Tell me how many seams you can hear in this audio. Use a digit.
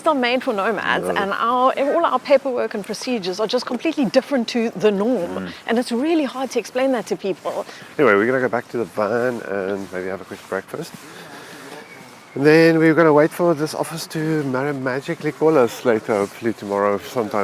0